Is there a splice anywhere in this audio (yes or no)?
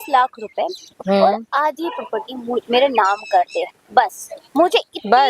no